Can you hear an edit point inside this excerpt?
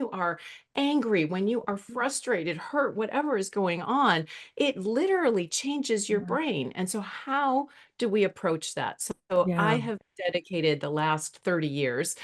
no; 0 cuts

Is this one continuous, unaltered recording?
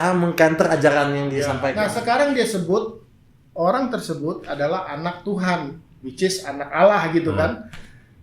no; 1 cut; at 1.6 s

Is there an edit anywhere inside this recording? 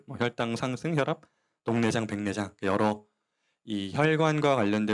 no; 0 cuts

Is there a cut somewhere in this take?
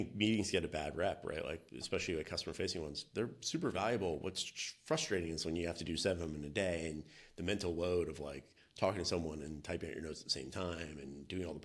yes; 1 cut; at 1.7 s

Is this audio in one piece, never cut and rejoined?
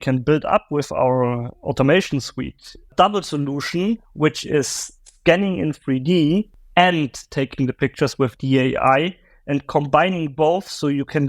no; 2 cuts; at 2.9 s, 6.6 s

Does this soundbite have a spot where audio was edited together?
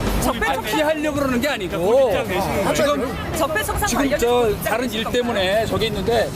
yes; 1 cut; at 5.3 s

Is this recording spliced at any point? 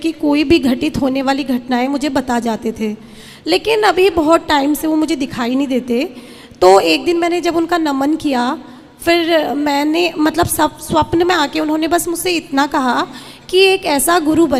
no; 0 cuts

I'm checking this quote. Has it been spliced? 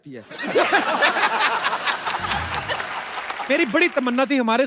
yes; 1 cut; at 3.4 s

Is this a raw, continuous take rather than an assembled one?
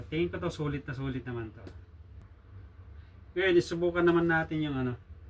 no; 1 cut; at 2.2 s

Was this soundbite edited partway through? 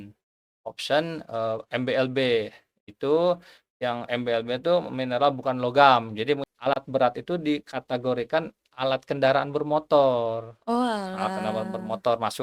yes; 1 cut; at 6.5 s

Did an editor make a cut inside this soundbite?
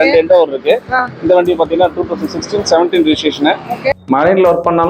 yes; 1 cut; at 4.0 s

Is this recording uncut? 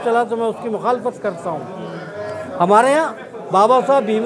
yes; 0 cuts

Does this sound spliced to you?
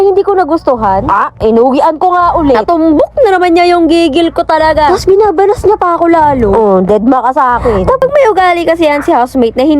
yes; 1 cut; at 8.0 s

